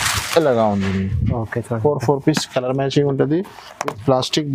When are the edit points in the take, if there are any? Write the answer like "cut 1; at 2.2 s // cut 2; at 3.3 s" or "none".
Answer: none